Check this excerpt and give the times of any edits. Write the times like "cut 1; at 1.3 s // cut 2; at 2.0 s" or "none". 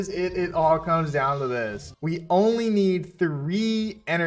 cut 1; at 1.9 s